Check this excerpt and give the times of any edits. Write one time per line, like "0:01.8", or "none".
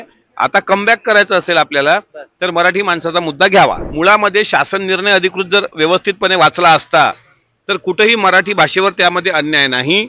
0:03.8